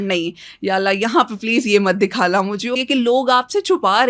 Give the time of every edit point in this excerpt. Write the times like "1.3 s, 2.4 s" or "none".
2.7 s